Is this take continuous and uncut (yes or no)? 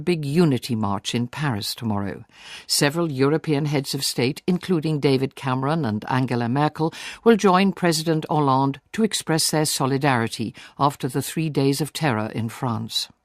no